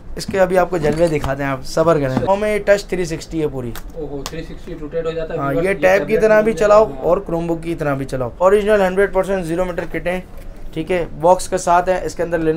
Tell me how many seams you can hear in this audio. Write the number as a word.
two